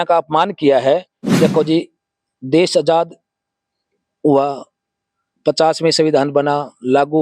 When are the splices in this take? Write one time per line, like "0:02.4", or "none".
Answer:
0:01.2